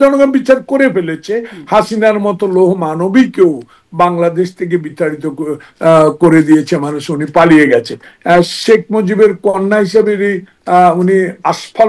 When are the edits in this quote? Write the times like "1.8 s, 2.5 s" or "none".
none